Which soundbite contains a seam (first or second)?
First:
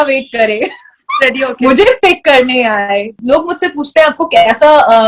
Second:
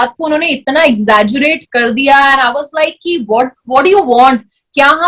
first